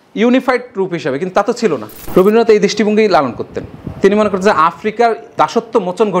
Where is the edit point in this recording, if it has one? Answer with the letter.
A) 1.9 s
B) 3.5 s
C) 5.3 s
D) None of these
A